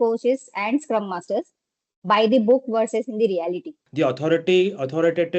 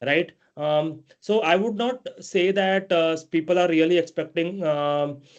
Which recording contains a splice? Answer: first; 1 cut; at 3.8 s

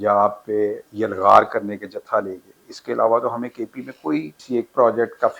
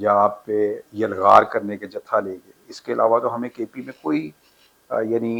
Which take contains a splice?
first; 1 cut; at 4.4 s

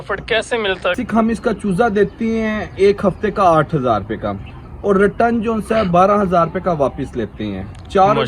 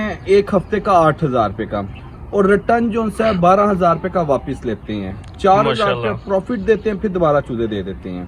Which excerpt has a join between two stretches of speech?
first; 1 cut; at 1.0 s

